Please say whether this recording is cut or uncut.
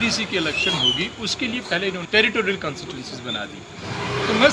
cut